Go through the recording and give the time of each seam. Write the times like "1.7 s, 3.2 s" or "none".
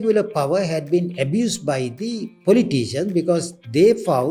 none